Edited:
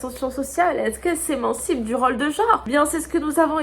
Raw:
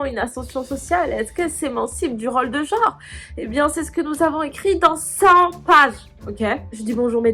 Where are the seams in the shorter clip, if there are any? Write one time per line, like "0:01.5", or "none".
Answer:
0:02.6

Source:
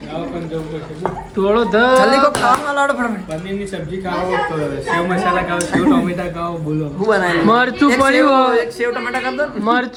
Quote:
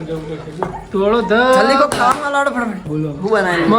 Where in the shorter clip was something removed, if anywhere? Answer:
0:02.8

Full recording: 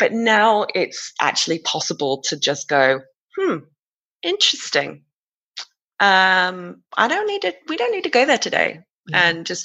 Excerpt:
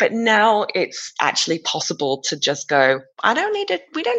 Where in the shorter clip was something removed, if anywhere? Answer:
0:03.1

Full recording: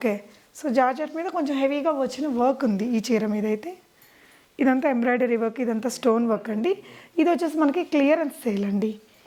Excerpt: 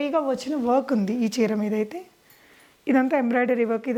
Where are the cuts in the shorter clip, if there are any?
none

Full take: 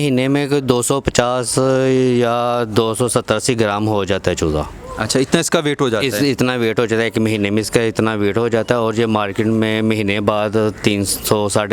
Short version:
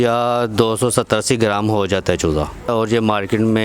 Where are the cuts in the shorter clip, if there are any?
0:02.7

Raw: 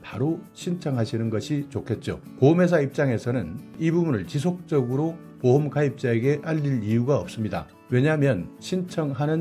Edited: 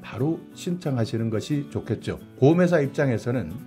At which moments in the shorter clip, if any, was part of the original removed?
none

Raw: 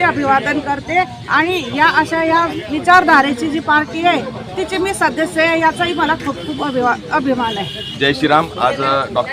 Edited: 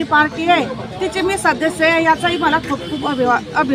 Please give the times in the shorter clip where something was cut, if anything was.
none

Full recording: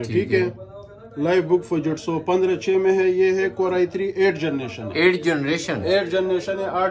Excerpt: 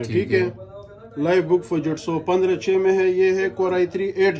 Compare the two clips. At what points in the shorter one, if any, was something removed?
none

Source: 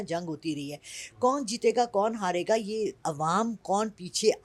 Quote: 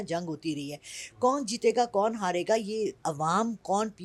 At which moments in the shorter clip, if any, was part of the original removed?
none

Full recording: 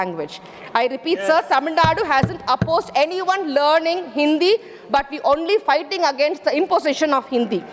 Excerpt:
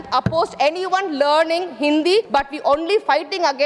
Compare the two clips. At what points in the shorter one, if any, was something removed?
0:02.3

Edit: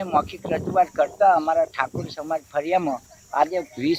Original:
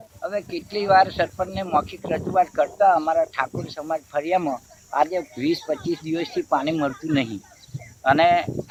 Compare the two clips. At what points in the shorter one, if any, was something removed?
none

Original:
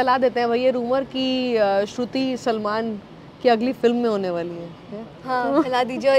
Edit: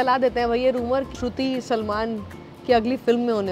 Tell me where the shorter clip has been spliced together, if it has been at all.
0:01.1

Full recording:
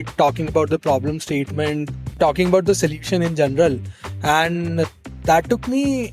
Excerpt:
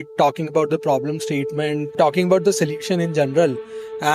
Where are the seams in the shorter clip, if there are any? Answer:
0:01.9

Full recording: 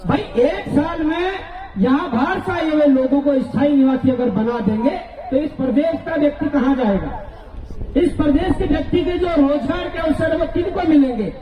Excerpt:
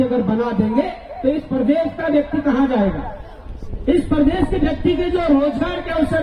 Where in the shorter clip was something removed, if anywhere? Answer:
none

